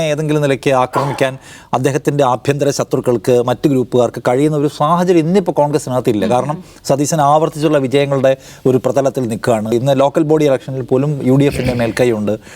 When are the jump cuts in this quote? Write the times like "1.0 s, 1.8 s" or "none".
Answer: 9.7 s